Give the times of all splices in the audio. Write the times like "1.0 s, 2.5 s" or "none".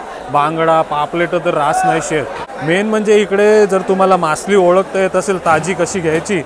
2.4 s